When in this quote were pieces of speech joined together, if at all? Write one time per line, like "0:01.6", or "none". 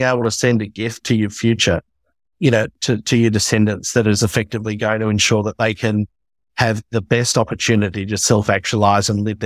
none